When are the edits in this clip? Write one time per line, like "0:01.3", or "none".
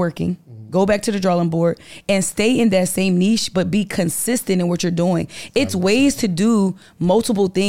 none